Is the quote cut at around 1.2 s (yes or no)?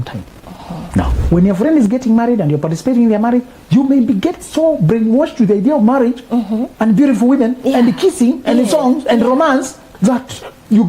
yes